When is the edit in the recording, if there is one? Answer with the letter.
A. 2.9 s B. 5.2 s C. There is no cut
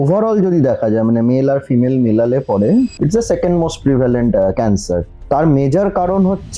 B